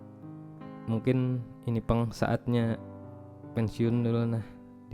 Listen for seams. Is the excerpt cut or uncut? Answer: uncut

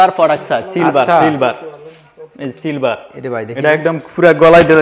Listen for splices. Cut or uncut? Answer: uncut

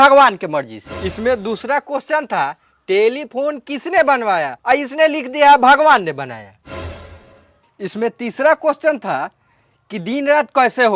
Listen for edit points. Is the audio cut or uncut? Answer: uncut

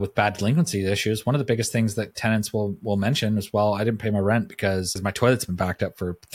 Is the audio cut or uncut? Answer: cut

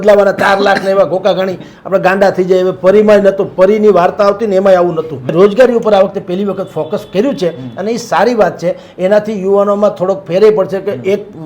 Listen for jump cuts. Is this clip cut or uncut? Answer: cut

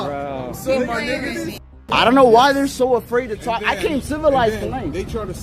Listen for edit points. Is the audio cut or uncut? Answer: cut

